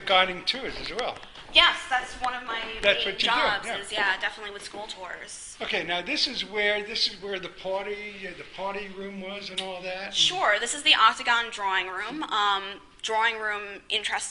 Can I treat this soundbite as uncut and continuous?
no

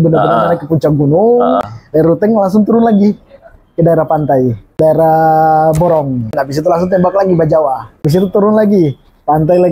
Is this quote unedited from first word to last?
no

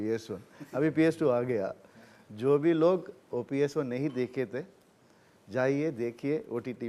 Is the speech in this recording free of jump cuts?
yes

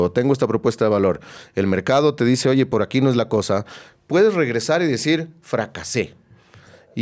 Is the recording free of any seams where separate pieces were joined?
yes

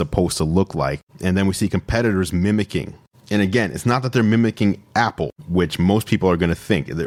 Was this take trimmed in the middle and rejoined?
no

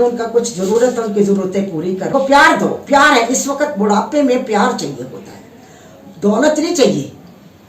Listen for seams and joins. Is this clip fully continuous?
no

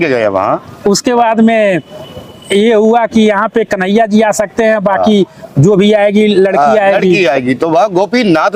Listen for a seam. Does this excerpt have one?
no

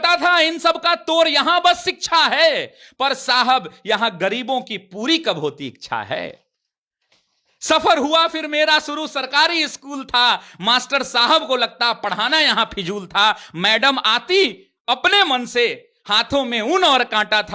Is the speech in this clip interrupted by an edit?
no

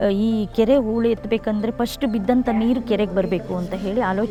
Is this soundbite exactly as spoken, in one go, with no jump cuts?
yes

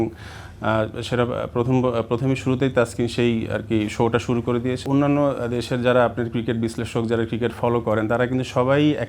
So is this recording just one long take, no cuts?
no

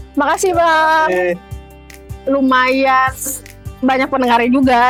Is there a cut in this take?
no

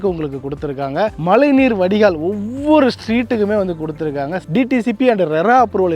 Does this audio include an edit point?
yes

